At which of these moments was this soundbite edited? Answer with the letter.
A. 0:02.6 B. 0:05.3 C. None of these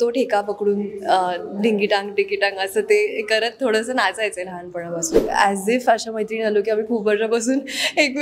B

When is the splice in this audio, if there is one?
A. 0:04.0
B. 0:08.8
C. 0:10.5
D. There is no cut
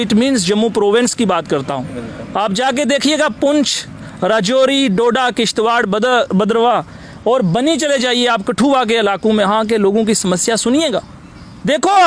D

